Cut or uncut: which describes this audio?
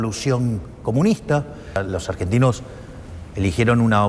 cut